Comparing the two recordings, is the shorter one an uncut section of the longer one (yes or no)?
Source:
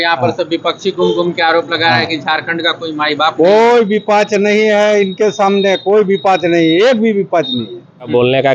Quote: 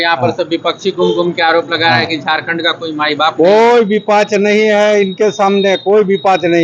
yes